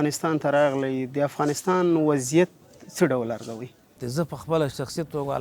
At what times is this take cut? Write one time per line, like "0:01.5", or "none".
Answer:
0:04.0